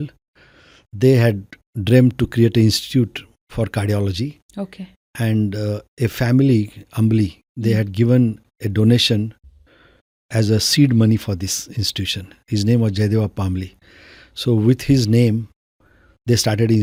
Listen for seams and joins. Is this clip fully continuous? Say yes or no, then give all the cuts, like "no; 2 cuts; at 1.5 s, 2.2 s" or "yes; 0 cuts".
yes; 0 cuts